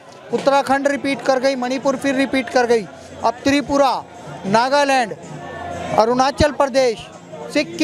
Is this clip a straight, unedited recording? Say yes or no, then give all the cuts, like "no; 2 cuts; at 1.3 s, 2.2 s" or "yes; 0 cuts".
yes; 0 cuts